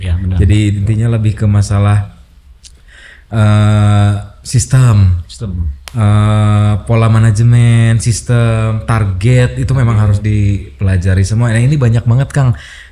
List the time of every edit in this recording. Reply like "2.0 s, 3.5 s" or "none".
none